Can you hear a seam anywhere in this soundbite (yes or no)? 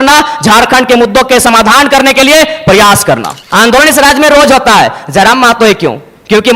yes